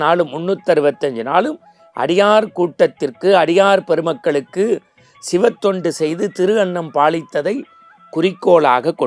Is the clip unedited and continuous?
yes; 0 cuts

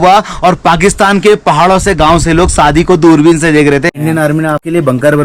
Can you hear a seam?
yes; 1 cut; at 4.3 s

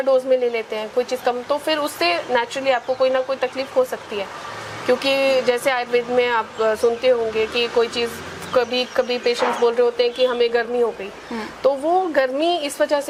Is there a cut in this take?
no; 0 cuts

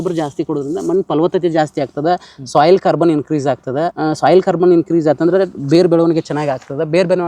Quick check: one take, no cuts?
no; 1 cut; at 3.9 s

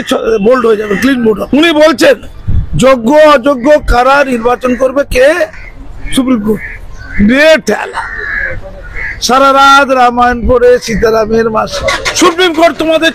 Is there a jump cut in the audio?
yes; 2 cuts; at 1.4 s, 11.9 s

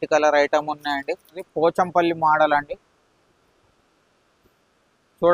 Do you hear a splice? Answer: yes; 1 cut; at 1.4 s

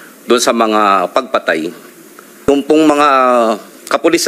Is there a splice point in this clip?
yes; 1 cut; at 2.5 s

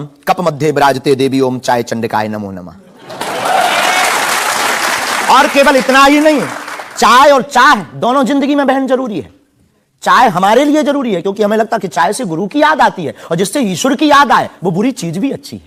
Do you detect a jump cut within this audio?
no; 0 cuts

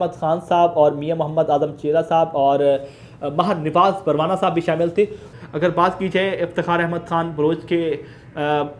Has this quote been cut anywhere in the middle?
yes; 1 cut; at 5.3 s

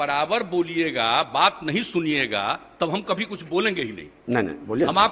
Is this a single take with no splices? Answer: yes; 0 cuts

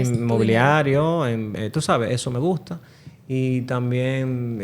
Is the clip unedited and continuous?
yes; 0 cuts

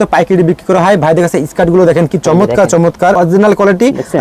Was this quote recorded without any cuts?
no; 1 cut; at 3.2 s

